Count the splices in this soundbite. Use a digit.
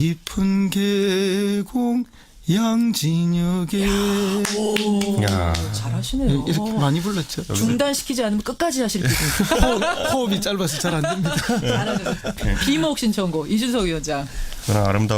1